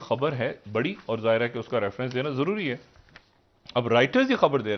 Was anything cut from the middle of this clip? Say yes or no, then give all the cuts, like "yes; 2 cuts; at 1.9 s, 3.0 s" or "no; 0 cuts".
no; 0 cuts